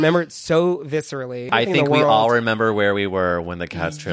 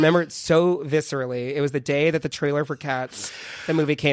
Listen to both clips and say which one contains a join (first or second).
first